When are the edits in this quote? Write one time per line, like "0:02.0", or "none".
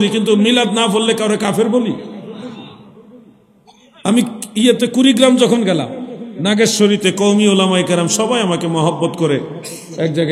none